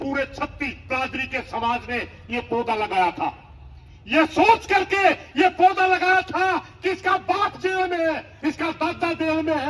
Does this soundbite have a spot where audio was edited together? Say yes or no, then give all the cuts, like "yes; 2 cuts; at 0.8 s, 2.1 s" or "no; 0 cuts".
no; 0 cuts